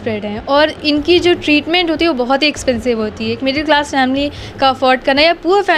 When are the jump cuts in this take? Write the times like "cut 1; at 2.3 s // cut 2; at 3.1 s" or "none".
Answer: none